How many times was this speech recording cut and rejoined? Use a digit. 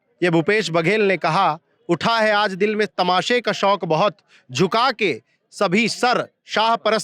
0